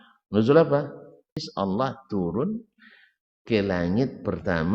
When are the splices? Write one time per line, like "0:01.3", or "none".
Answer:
0:01.5